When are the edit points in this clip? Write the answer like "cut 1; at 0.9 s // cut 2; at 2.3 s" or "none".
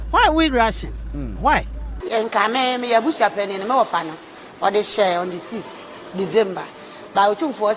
cut 1; at 2.1 s